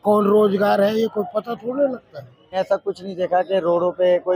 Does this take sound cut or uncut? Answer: cut